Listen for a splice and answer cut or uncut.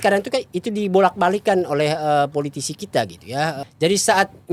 cut